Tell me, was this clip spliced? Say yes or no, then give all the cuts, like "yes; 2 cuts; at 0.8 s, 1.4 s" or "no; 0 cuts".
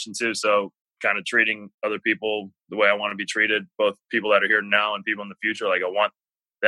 no; 0 cuts